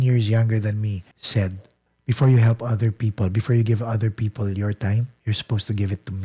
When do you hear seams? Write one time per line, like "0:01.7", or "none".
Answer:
0:01.1
0:05.1